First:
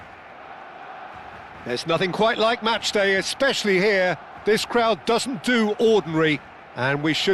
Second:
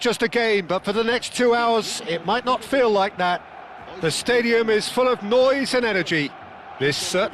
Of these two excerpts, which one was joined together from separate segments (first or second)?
first